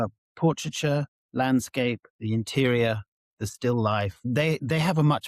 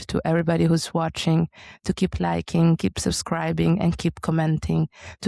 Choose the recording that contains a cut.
first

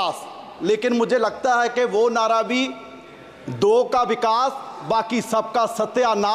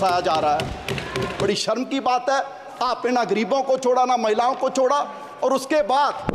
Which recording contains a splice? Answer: second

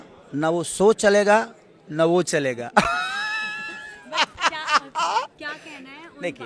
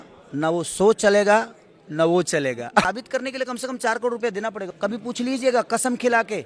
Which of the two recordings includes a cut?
second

